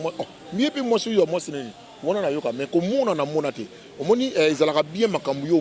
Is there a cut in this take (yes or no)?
no